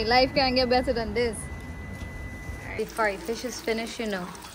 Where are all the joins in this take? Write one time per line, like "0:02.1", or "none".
0:02.7